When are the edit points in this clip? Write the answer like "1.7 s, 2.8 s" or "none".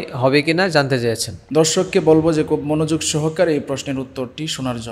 1.3 s